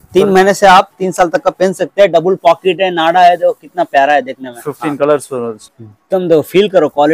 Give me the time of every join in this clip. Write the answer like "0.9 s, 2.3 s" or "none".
5.7 s